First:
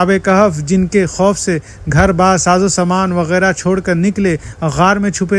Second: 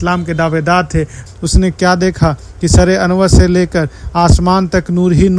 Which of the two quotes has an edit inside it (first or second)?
second